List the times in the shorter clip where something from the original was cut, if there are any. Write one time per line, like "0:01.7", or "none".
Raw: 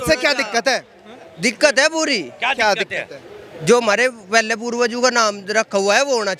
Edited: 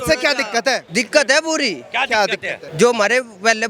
0:00.8
0:02.6